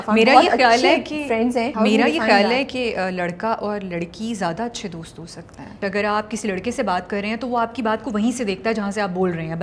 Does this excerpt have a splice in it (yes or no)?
yes